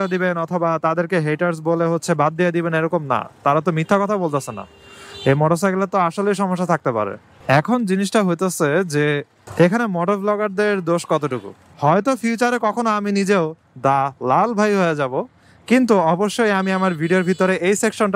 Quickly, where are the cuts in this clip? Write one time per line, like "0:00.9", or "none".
0:11.6

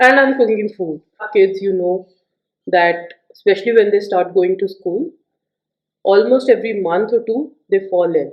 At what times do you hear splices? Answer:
0:01.3

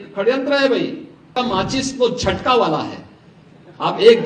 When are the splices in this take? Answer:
0:01.3

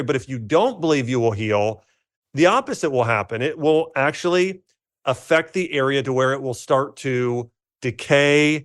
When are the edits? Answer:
0:07.7

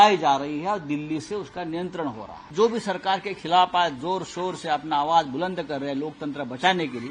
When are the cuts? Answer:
0:02.4

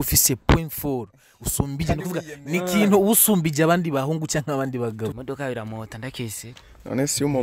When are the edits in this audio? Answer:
0:05.1

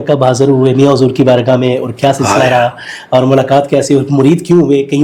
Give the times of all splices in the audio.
none

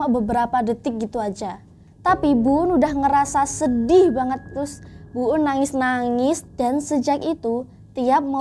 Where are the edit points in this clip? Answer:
0:06.4

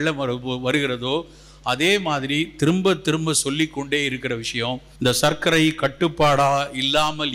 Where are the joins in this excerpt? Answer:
0:04.9

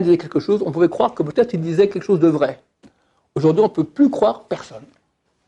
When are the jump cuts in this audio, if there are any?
none

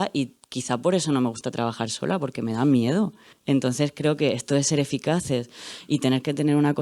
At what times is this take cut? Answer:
0:03.3

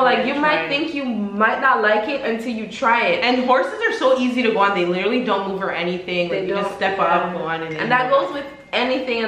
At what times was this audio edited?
none

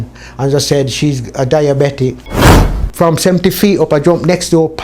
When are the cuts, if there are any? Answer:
0:02.6

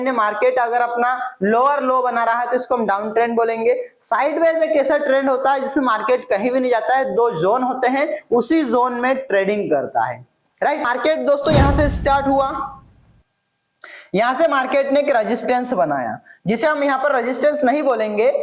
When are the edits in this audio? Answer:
0:10.9

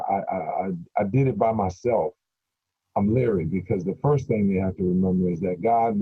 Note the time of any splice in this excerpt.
none

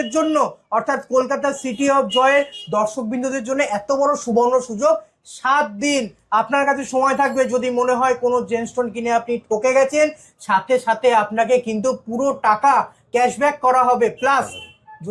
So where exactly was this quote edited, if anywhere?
none

